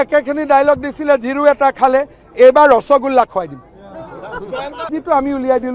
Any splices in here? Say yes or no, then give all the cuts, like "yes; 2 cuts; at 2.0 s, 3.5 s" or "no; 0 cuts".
no; 0 cuts